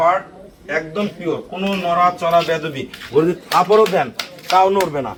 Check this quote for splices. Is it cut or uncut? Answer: uncut